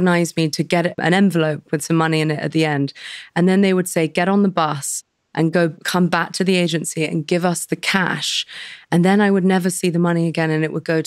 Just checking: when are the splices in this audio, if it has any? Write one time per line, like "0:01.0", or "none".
0:01.0